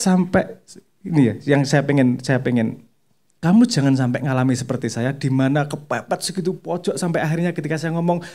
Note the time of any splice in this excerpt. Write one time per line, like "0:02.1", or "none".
none